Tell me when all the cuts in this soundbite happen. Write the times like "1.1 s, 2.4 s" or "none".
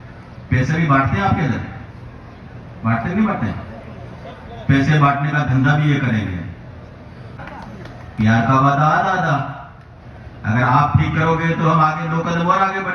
7.3 s